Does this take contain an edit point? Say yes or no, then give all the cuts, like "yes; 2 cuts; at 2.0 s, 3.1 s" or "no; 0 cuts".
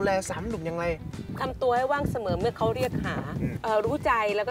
yes; 1 cut; at 3.6 s